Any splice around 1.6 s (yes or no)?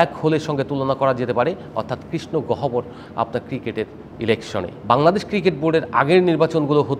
no